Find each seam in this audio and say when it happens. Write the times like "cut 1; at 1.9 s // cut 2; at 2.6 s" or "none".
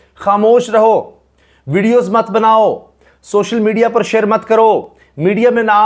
none